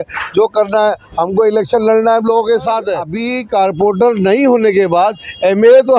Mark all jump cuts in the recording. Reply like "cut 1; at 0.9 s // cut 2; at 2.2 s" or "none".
cut 1; at 3.1 s